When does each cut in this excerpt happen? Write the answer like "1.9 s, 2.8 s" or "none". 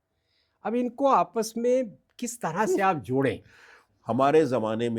3.8 s